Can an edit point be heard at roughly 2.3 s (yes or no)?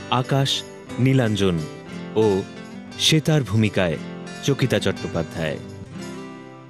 no